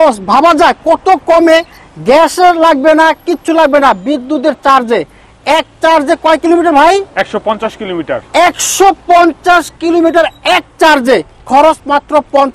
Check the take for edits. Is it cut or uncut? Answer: uncut